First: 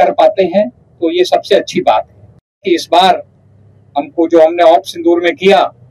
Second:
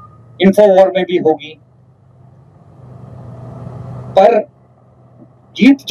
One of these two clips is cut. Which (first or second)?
first